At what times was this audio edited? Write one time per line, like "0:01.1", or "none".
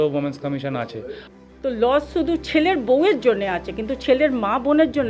0:01.0